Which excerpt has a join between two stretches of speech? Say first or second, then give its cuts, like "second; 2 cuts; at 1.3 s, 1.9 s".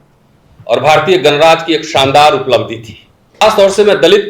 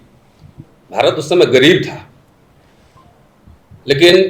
first; 1 cut; at 3.4 s